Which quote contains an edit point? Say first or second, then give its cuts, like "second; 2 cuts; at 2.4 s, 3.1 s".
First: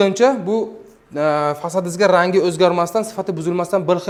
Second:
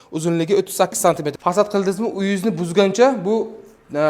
second; 1 cut; at 1.3 s